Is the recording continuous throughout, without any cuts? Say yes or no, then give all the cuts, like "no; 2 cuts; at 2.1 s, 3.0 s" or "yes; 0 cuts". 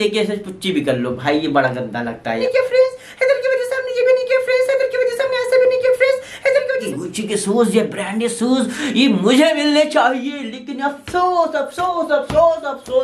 no; 2 cuts; at 2.4 s, 6.8 s